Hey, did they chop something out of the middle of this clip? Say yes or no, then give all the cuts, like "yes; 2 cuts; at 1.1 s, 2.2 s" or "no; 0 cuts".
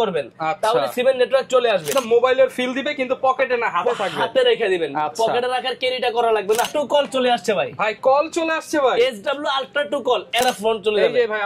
yes; 3 cuts; at 1.9 s, 6.7 s, 10.4 s